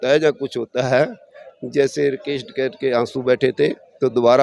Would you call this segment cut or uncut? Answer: uncut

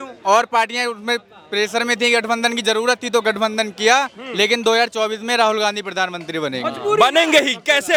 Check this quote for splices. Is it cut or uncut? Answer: uncut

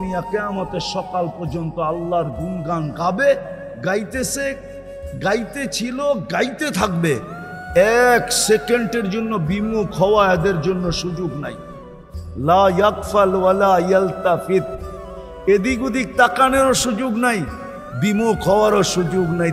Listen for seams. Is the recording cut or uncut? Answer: uncut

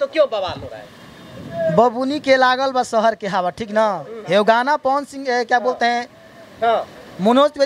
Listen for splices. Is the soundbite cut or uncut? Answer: uncut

